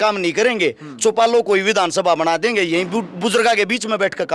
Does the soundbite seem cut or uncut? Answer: uncut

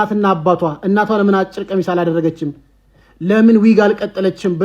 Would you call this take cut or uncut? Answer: uncut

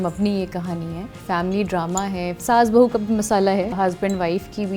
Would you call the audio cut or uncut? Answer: cut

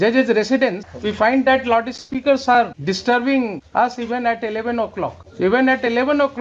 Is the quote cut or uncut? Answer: cut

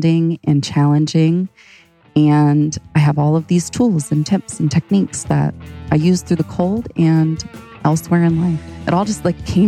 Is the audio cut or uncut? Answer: cut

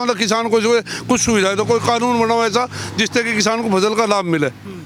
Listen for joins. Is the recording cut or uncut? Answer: uncut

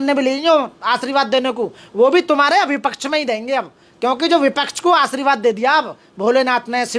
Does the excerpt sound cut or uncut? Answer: uncut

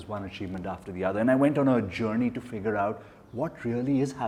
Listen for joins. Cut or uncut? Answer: uncut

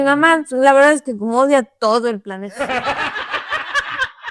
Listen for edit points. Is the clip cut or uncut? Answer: uncut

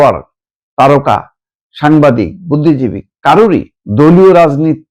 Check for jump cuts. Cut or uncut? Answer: cut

